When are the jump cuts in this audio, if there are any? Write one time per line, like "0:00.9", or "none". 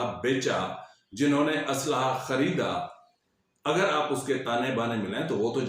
none